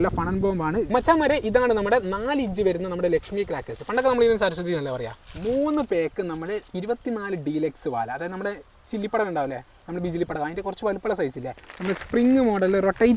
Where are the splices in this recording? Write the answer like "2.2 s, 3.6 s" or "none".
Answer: 0.9 s, 5.3 s, 11.6 s